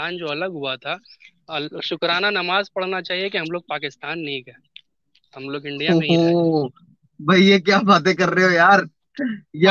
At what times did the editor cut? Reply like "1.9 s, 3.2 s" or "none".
none